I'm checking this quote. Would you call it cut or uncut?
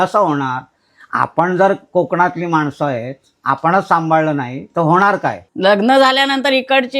cut